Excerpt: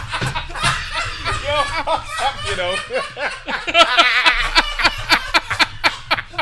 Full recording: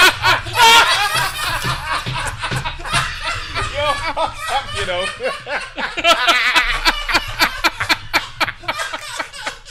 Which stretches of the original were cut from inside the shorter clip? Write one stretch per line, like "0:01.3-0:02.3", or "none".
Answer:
none

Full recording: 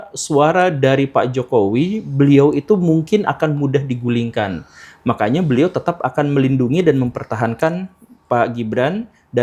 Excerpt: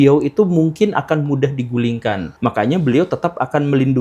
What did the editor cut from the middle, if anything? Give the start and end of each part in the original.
0:04.6-0:04.9

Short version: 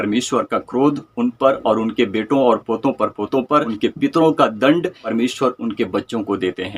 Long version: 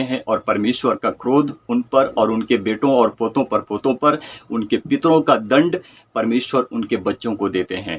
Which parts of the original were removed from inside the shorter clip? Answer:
0:04.2-0:04.6
0:05.9-0:06.1

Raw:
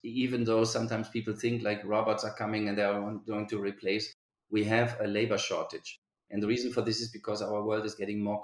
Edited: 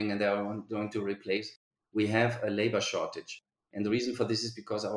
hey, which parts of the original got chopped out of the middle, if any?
none

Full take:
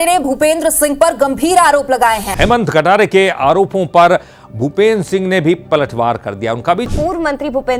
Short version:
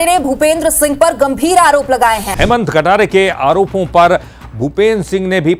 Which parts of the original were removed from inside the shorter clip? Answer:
none

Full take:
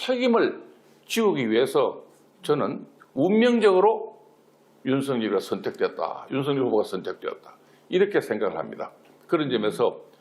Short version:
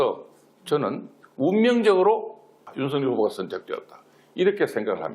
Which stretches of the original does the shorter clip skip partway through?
0:04.4-0:06.2

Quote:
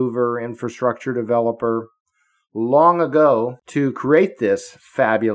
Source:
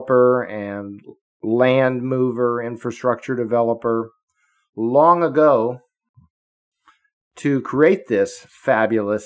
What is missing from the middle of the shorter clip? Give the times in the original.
0:05.8-0:07.3

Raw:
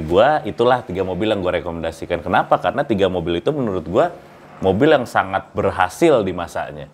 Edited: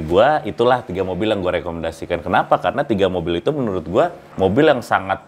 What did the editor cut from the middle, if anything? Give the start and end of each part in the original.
0:04.2-0:04.5

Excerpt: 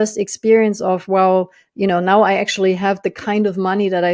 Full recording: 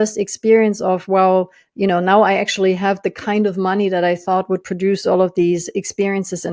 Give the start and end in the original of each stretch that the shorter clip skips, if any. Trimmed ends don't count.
none

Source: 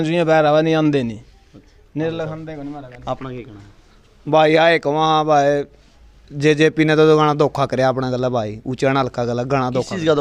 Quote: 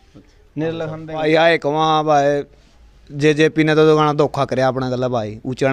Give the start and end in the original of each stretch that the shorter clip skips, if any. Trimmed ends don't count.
0:02.6-0:04.4

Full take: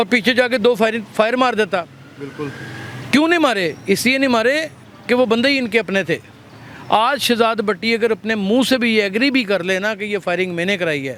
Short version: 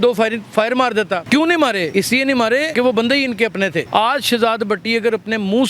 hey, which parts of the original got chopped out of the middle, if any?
0:01.9-0:03.1
0:04.0-0:04.5
0:06.2-0:06.8

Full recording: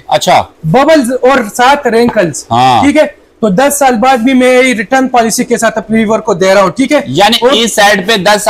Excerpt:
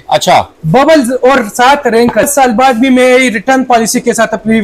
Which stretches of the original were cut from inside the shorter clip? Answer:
0:02.3-0:03.7

